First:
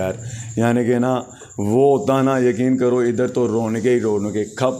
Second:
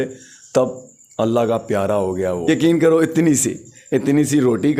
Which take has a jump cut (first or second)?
second